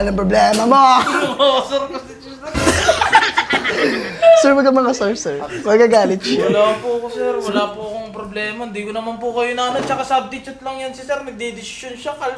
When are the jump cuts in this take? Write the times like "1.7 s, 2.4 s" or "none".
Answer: none